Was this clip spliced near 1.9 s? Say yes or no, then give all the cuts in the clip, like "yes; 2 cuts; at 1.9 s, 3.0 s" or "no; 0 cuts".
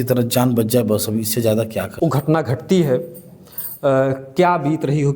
yes; 1 cut; at 1.9 s